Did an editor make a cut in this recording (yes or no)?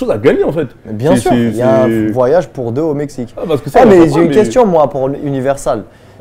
no